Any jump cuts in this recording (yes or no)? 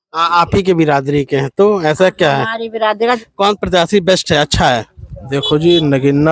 yes